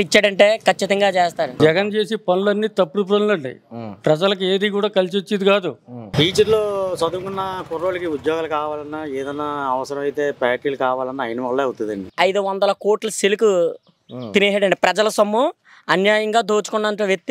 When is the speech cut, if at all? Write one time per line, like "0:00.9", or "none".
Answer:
0:01.5
0:06.0
0:12.0